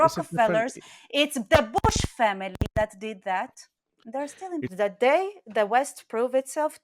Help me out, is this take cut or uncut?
uncut